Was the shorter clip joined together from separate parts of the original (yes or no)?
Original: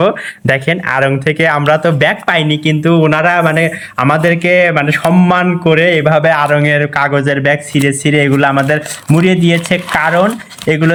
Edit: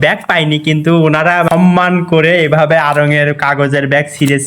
yes